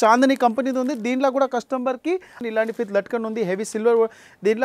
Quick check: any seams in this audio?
yes; 1 cut; at 2.4 s

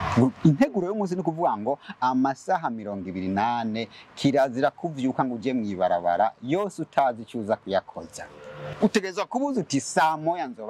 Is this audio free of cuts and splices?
yes; 0 cuts

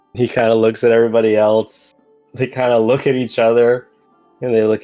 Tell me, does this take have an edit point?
no; 0 cuts

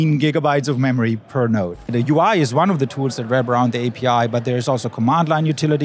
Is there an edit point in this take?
yes; 1 cut; at 1.9 s

